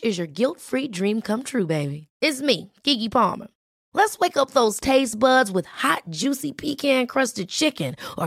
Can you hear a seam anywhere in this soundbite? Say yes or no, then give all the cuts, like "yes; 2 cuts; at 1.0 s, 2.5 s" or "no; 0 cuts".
no; 0 cuts